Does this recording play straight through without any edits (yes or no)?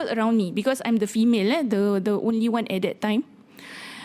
yes